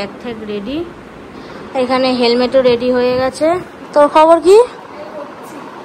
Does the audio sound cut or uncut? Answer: uncut